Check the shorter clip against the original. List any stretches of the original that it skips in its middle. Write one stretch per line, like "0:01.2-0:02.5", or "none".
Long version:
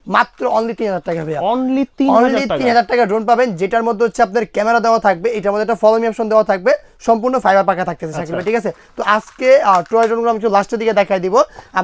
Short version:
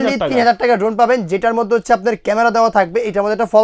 none